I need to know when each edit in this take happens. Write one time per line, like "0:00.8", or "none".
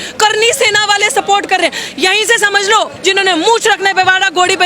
0:02.9